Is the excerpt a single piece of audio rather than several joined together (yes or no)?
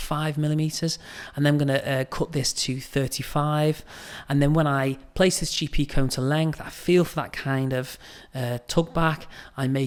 yes